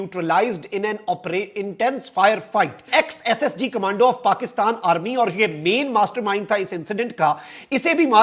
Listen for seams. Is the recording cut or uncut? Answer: cut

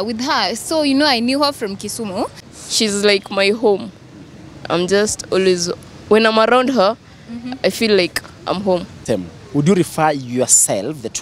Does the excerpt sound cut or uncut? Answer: cut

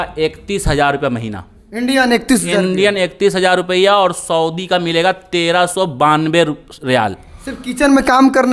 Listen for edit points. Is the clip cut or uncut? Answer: uncut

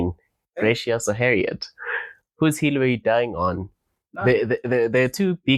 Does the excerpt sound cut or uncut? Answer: uncut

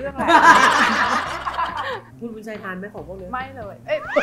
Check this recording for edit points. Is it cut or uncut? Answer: cut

